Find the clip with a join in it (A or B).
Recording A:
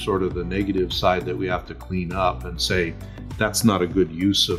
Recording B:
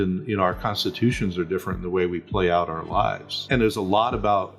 B